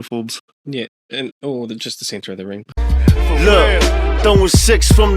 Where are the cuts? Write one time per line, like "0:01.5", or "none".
0:02.8